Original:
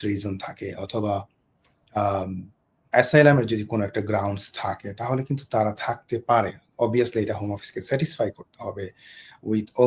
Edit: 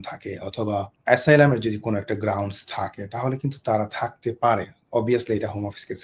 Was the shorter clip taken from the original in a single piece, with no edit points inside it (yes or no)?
no